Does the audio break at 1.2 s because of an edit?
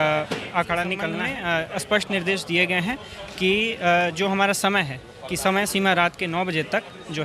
yes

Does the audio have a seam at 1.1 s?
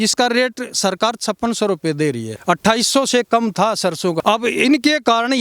no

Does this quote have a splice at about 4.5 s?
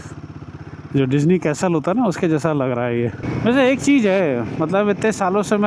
no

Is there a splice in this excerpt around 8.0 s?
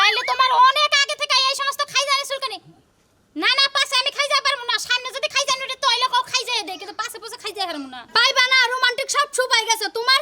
yes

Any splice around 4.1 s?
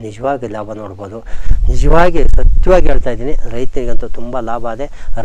no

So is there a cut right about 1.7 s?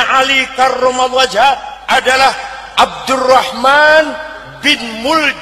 yes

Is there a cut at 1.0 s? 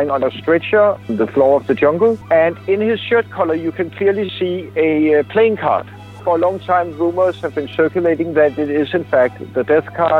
yes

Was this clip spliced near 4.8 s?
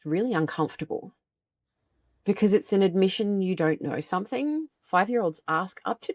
yes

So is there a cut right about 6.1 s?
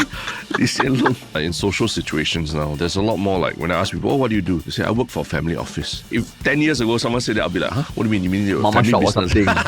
yes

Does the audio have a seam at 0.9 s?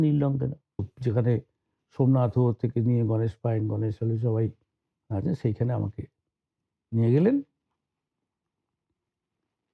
yes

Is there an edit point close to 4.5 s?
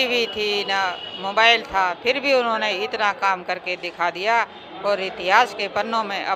no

